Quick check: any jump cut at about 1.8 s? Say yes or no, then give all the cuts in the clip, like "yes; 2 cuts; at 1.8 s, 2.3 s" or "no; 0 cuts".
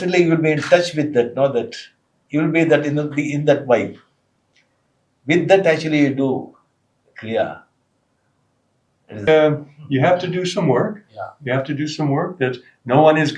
no; 1 cut; at 9.2 s